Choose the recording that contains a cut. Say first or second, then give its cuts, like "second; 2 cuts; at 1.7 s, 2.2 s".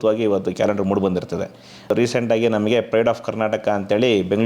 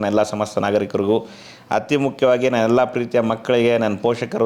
first; 1 cut; at 1.8 s